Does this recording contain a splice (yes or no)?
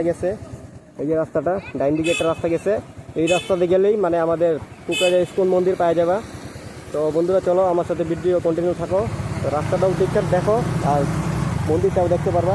no